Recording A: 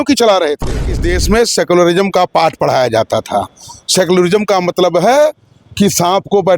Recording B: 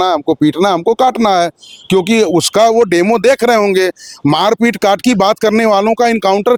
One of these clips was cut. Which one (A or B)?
A